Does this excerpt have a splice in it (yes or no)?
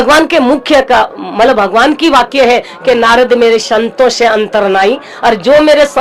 no